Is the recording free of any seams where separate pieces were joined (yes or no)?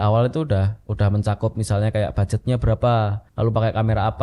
no